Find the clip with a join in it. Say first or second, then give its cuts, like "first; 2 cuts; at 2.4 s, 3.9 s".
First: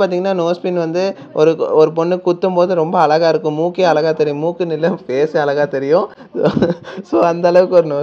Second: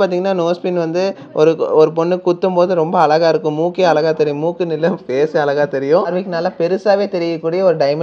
second; 1 cut; at 6.1 s